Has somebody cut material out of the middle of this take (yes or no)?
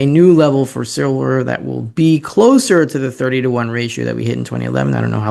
no